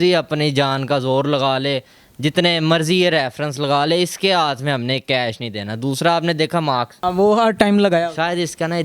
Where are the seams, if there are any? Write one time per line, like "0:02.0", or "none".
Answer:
0:07.0